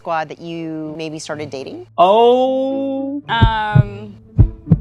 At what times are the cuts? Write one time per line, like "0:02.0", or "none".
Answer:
0:00.9